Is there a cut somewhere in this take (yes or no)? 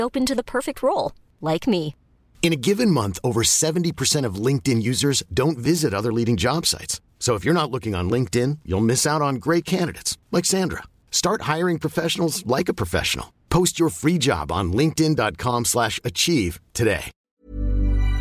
yes